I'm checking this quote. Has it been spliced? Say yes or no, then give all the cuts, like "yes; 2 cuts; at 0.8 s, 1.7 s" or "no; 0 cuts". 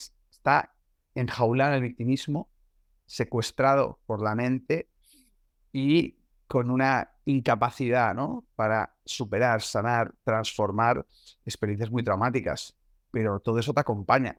no; 0 cuts